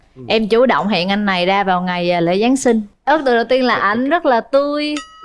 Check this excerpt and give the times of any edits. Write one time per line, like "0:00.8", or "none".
none

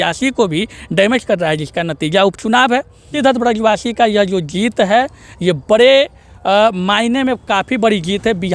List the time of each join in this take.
0:03.1

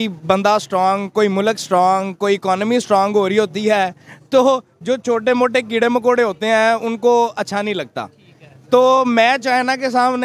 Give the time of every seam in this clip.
none

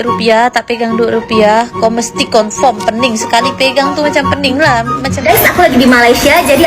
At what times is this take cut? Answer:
0:05.3

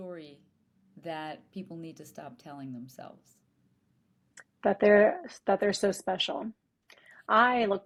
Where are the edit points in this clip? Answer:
none

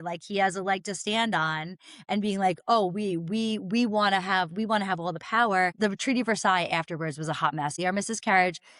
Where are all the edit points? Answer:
0:05.7
0:07.7

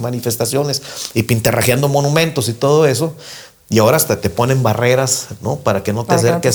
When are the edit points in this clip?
none

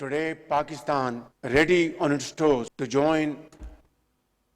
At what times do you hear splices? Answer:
0:01.3
0:02.8

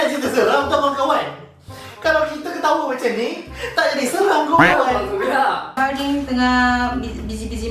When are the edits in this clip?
0:05.7

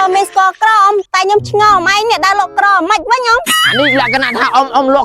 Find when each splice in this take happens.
0:03.4

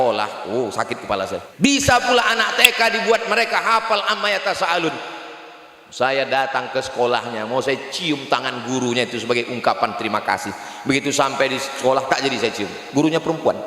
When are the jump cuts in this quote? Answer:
0:01.4

